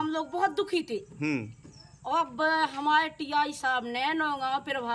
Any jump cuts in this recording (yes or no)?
no